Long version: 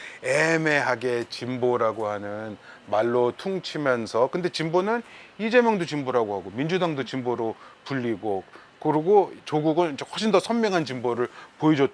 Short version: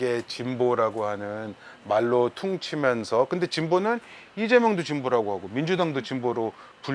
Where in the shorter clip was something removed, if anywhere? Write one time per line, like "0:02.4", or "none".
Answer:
none